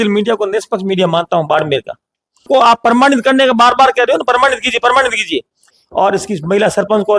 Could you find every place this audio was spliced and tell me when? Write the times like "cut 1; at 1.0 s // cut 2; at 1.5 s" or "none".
cut 1; at 2.5 s // cut 2; at 5.7 s